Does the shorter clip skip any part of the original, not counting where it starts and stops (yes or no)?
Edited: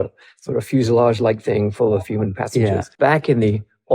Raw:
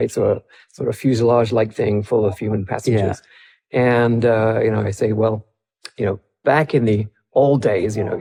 yes